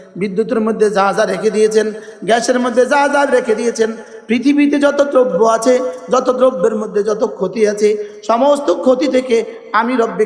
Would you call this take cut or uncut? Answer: uncut